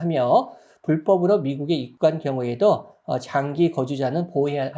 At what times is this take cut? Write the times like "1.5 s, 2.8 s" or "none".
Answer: 1.9 s